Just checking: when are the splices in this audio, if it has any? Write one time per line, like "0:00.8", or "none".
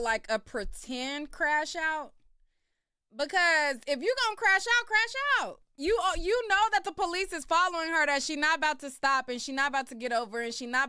0:05.6

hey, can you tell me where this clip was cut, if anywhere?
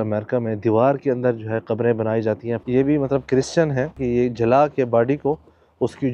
0:02.6
0:04.0

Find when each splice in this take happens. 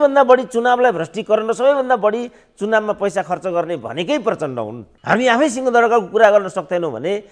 0:04.9

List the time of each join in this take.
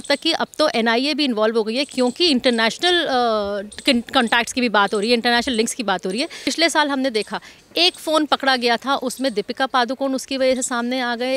0:06.4

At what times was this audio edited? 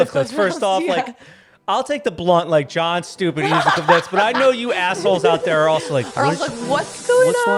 none

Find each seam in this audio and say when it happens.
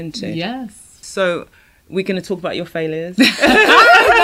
0:00.9

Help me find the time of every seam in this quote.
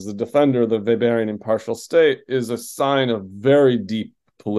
none

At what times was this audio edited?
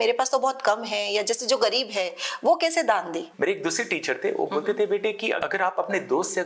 0:03.2
0:05.4

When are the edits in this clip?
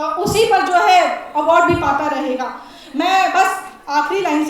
none

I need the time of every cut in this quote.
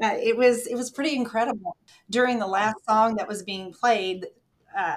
0:02.1

